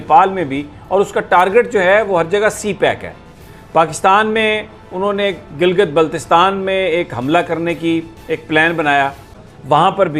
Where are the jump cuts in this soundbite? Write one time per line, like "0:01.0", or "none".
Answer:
0:09.3